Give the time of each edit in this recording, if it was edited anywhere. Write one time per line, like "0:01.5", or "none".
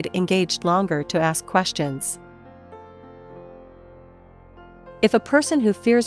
0:02.0
0:05.0